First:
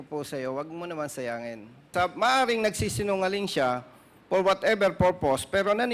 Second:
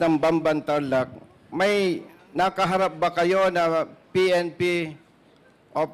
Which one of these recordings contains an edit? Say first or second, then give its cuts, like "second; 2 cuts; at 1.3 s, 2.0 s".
first; 1 cut; at 1.9 s